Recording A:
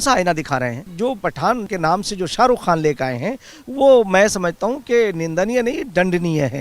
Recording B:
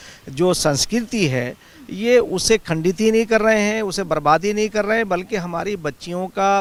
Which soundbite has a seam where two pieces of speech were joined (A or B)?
A